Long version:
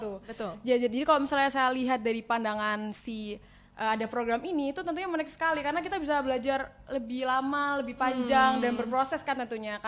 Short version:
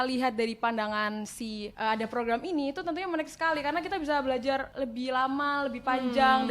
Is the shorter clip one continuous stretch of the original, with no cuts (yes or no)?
no